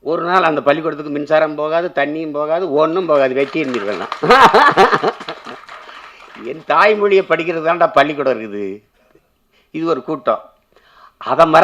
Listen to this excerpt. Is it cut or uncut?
uncut